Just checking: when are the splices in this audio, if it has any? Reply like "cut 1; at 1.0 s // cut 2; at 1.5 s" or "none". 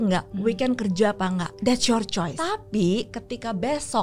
cut 1; at 1.5 s // cut 2; at 2.4 s